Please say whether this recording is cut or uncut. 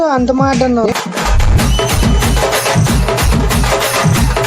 uncut